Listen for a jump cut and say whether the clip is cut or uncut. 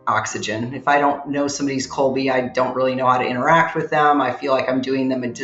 uncut